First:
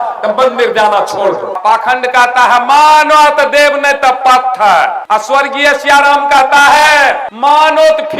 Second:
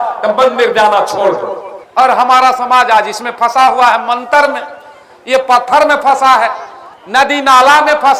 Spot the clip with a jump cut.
first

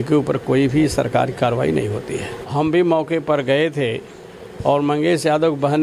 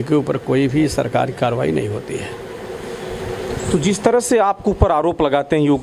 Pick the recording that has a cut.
first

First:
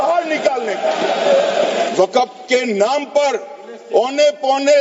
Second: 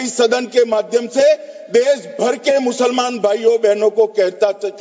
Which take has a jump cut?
first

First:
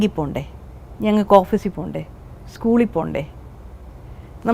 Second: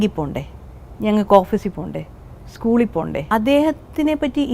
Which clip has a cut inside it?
second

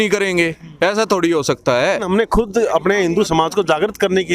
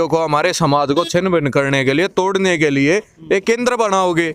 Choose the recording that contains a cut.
first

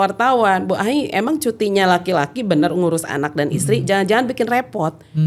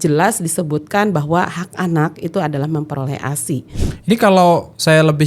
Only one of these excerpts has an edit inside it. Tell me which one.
second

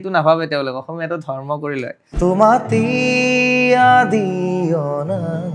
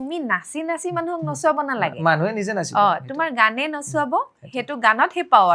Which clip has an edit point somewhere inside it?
first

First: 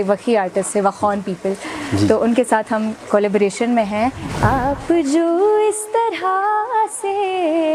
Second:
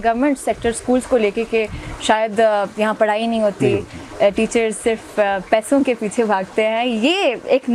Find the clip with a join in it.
first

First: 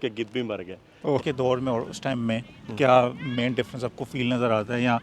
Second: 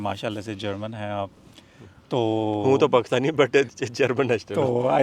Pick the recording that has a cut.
first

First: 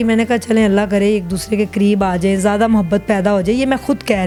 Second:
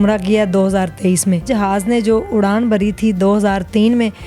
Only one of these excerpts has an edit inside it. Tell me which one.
second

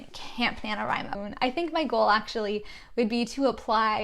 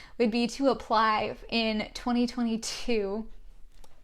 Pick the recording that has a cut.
first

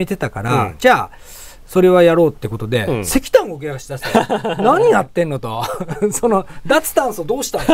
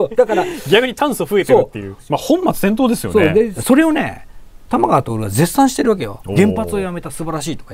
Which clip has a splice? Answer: second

